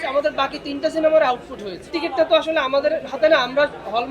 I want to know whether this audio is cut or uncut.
cut